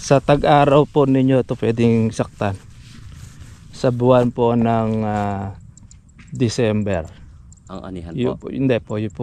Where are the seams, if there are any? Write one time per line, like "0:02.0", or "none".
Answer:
none